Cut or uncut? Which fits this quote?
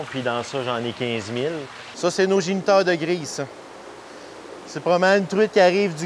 cut